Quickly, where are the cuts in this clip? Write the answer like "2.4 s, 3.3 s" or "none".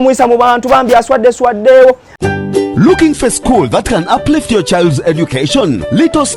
2.1 s